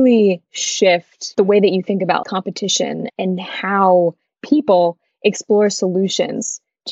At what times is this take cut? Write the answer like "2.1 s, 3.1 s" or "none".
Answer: 1.2 s, 2.2 s